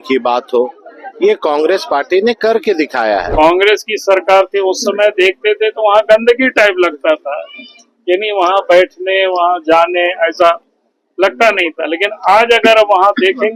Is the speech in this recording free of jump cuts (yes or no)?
no